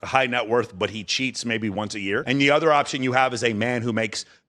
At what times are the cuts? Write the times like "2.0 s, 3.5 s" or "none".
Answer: 2.2 s